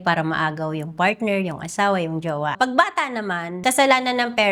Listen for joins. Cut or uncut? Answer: cut